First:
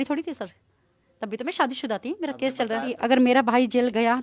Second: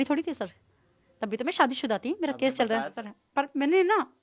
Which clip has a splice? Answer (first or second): first